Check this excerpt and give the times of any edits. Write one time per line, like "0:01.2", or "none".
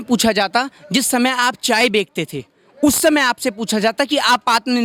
none